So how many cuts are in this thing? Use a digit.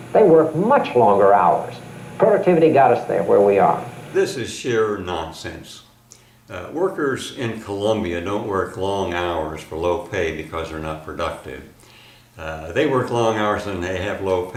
0